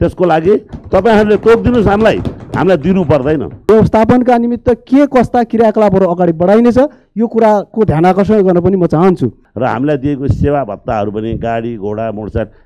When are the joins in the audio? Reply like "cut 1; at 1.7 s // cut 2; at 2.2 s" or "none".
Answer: cut 1; at 3.6 s // cut 2; at 9.4 s

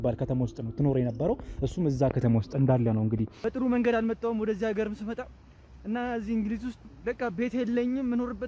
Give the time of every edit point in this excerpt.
cut 1; at 3.3 s

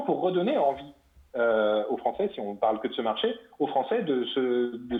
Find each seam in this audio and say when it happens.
none

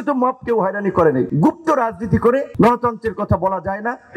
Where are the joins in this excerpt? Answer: cut 1; at 1.3 s // cut 2; at 2.5 s

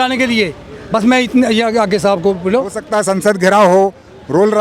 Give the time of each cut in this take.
cut 1; at 2.8 s

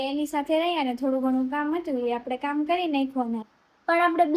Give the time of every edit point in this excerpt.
cut 1; at 3.4 s

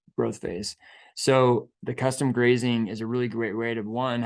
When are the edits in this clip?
cut 1; at 1.7 s

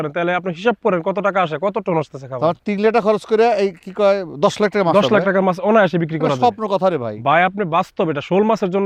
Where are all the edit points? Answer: none

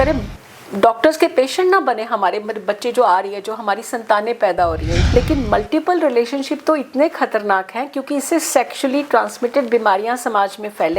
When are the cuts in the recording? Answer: cut 1; at 5.0 s

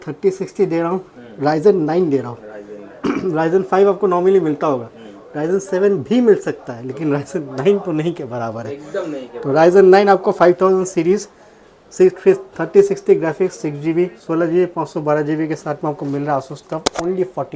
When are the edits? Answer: none

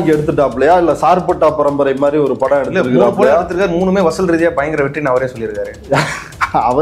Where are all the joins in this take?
none

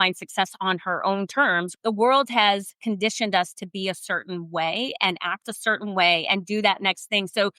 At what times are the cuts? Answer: cut 1; at 1.7 s

